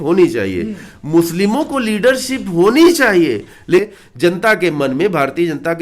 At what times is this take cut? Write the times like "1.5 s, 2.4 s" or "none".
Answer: 3.8 s